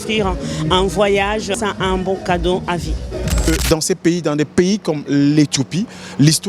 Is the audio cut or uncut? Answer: cut